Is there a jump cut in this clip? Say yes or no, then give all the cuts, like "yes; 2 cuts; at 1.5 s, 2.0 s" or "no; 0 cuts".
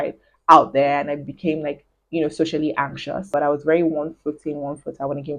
yes; 1 cut; at 3.3 s